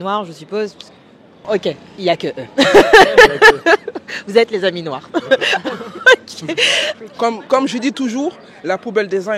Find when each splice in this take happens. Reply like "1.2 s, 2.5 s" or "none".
1.5 s, 7.0 s